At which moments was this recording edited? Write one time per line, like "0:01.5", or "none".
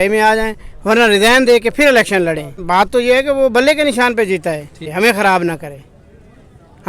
0:02.6
0:04.9

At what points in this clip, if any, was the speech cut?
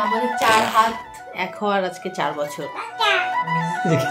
none

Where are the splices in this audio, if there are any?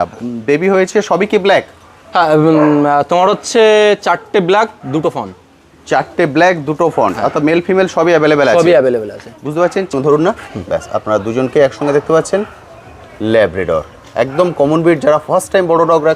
0:09.9

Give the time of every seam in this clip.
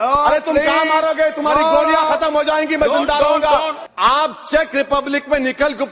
0:03.8

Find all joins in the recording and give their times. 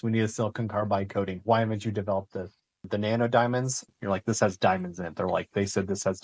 0:02.8
0:03.8

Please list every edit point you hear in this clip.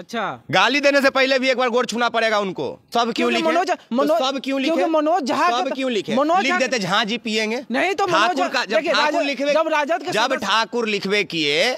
0:02.9

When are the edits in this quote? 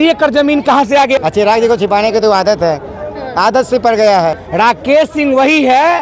0:01.2
0:04.4

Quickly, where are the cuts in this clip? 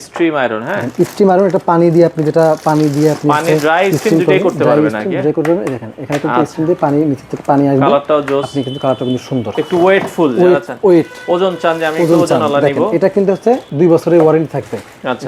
0:09.5
0:13.7

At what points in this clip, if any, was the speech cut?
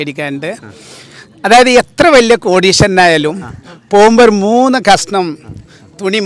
none

